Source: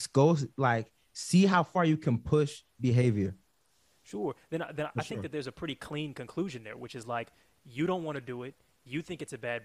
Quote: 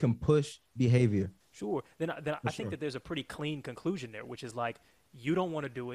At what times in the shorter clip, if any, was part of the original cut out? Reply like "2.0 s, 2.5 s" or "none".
1.4 s